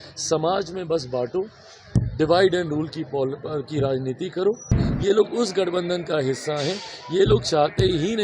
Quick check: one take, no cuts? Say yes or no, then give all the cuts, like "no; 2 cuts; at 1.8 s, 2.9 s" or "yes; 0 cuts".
no; 1 cut; at 4.8 s